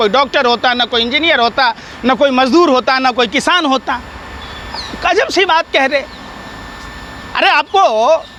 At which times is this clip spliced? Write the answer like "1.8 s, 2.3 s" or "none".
none